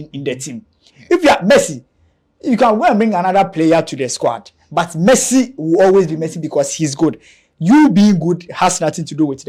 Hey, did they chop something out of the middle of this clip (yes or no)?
no